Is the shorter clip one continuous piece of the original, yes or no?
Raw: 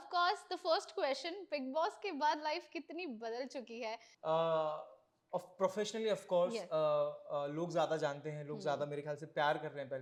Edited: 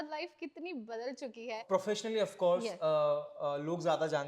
no